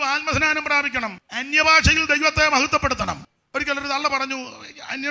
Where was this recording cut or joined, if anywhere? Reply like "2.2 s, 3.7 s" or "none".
1.3 s, 3.3 s